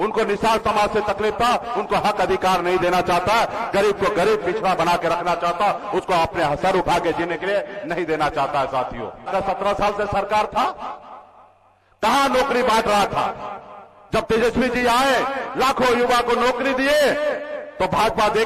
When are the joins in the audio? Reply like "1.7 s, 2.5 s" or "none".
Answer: 9.3 s